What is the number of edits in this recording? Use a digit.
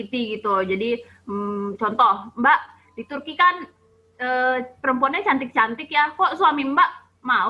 0